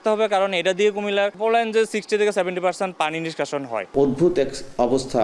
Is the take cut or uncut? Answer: cut